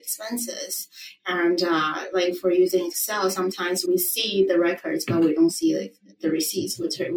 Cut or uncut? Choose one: uncut